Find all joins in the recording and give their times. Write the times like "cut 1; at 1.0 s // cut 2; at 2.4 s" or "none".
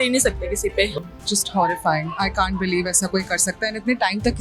cut 1; at 0.9 s

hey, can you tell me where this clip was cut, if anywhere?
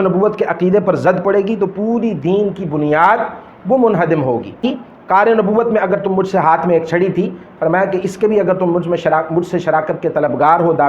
cut 1; at 4.6 s

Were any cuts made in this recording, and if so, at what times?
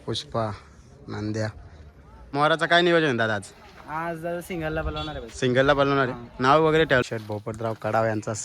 cut 1; at 2.3 s // cut 2; at 7.0 s

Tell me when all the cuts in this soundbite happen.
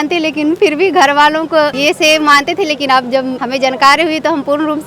cut 1; at 1.8 s // cut 2; at 3.4 s

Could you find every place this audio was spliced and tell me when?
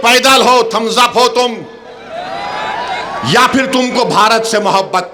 none

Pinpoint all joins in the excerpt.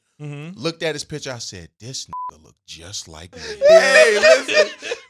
cut 1; at 3.6 s

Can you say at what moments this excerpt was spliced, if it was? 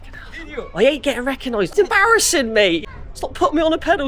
cut 1; at 1.7 s // cut 2; at 2.8 s

